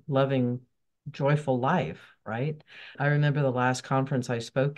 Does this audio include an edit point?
yes; 1 cut; at 2.9 s

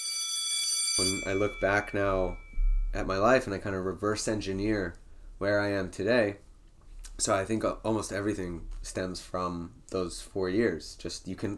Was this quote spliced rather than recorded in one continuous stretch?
yes; 1 cut; at 0.9 s

